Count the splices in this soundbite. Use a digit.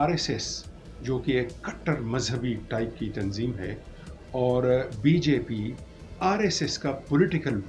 0